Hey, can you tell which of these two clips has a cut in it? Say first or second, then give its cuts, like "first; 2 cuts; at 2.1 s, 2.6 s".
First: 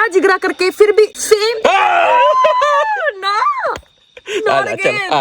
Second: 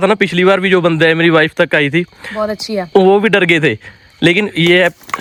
first; 1 cut; at 1.2 s